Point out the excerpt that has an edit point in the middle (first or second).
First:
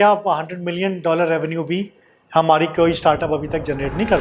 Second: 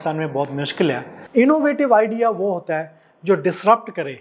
second